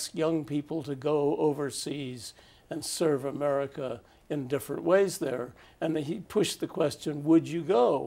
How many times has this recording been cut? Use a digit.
1